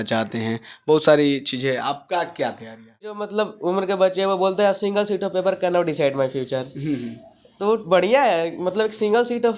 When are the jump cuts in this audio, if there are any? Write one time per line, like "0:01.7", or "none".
0:03.2